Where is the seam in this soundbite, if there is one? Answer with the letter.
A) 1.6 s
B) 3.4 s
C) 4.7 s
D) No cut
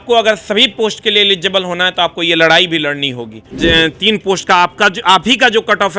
B